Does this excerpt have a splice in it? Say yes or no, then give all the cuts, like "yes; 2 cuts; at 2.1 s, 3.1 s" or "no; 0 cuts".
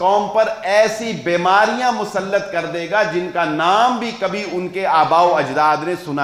no; 0 cuts